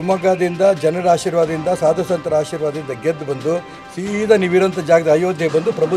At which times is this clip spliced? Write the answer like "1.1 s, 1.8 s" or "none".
none